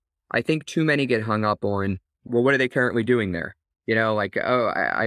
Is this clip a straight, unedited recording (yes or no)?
no